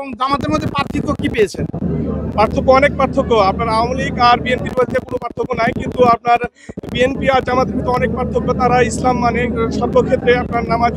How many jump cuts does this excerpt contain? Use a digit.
0